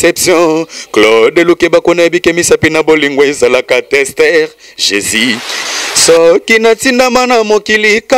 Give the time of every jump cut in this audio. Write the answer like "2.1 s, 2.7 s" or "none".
5.6 s

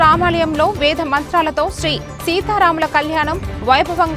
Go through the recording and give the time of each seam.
none

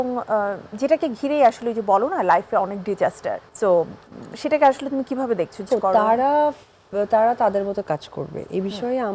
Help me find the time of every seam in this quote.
3.5 s, 5.7 s

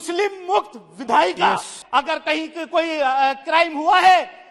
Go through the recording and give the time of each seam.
1.8 s

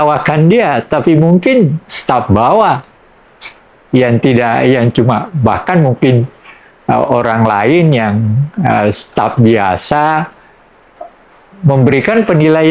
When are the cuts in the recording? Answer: none

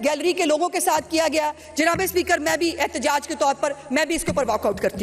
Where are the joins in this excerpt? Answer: none

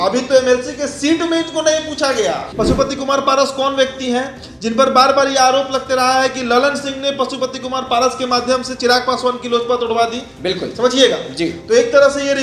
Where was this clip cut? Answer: 2.5 s

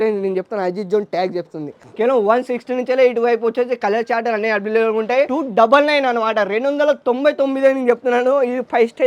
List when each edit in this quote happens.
5.3 s

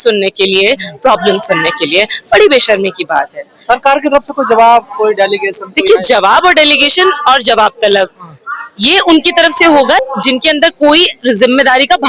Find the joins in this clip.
none

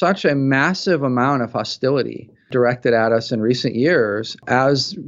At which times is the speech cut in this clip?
2.5 s

